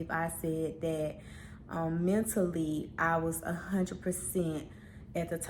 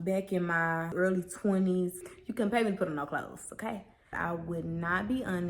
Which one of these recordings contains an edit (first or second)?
second